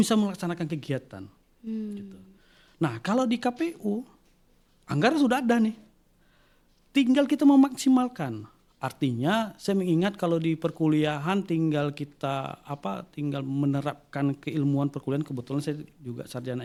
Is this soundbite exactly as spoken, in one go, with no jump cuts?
yes; 0 cuts

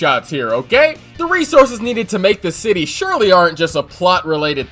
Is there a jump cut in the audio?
yes; 1 cut; at 1.1 s

